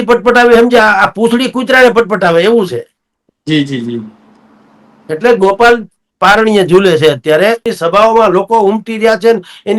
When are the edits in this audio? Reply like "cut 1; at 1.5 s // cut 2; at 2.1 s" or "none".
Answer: cut 1; at 7.7 s